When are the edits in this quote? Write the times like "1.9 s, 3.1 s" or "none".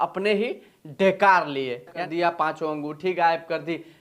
1.9 s